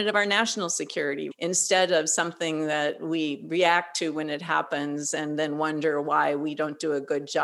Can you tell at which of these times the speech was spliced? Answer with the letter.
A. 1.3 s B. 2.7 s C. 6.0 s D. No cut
A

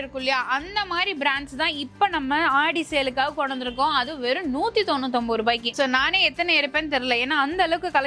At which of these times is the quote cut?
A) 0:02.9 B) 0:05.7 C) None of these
B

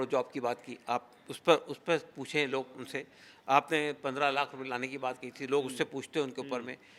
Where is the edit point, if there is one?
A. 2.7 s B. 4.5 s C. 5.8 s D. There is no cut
D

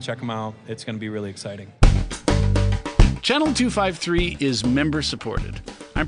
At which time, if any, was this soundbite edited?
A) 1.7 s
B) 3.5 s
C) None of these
A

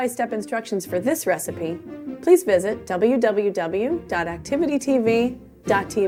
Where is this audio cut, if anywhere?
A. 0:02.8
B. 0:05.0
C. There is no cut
C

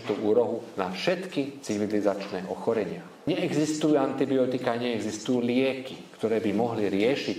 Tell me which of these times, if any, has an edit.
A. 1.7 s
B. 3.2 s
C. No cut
B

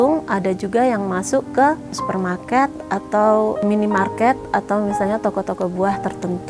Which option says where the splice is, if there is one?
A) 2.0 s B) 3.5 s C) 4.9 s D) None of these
A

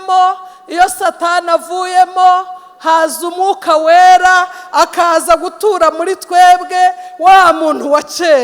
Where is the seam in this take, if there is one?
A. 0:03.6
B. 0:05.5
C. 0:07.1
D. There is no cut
D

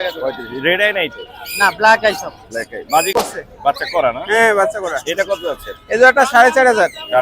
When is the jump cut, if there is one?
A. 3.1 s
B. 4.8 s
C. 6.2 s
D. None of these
A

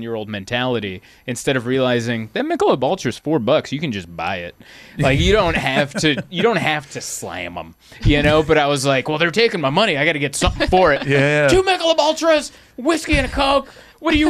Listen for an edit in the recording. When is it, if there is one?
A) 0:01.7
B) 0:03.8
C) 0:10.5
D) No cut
D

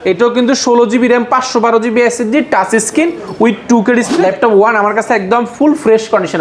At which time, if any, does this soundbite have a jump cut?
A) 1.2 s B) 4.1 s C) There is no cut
B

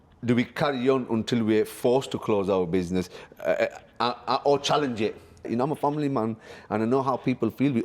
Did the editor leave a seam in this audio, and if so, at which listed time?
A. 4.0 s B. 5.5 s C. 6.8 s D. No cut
B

